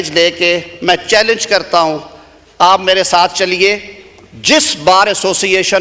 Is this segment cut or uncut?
uncut